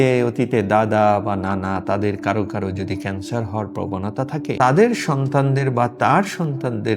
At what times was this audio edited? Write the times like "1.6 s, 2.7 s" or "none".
4.6 s